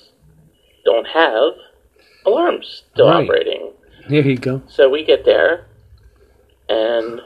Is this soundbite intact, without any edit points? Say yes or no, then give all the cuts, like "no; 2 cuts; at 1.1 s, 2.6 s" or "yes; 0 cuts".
yes; 0 cuts